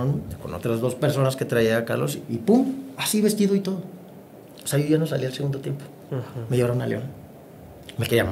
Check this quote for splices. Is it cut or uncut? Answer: uncut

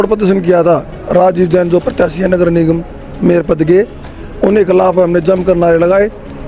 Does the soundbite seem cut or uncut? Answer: uncut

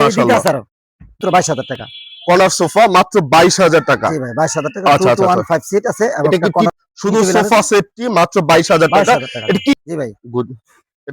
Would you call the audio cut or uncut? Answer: cut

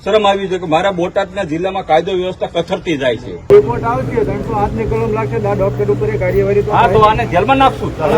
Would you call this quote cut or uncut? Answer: cut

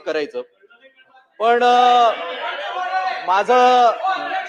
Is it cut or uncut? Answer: uncut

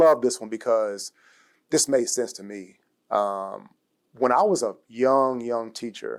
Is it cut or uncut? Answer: uncut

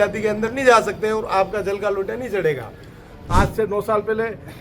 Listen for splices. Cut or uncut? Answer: cut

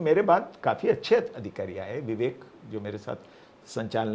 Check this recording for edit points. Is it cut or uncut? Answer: uncut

